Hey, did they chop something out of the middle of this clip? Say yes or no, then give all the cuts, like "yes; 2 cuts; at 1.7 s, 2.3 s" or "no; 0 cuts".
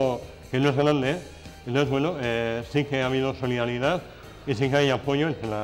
no; 0 cuts